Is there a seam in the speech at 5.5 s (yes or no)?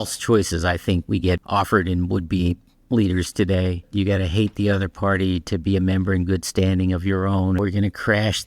no